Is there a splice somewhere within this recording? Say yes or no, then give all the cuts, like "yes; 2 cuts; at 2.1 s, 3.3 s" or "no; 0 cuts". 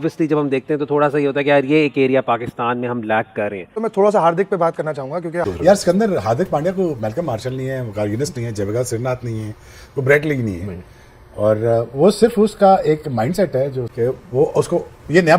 yes; 2 cuts; at 3.6 s, 5.5 s